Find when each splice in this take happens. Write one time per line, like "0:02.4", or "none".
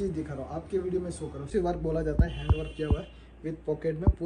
0:01.5